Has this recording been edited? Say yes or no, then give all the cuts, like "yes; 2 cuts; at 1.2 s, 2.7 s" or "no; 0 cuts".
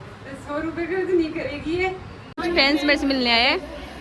yes; 1 cut; at 2.3 s